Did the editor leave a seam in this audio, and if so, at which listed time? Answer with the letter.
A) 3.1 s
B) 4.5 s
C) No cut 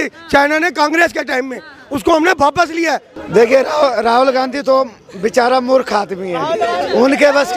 A